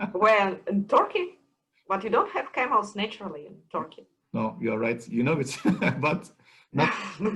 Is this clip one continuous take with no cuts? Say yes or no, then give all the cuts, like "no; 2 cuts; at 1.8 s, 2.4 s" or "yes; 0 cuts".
yes; 0 cuts